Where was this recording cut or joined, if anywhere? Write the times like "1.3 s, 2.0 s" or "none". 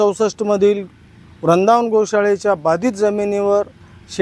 none